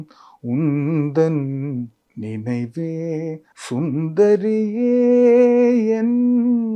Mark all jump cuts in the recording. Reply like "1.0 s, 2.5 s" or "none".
3.5 s